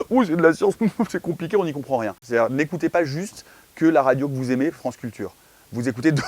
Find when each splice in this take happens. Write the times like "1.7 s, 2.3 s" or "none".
2.2 s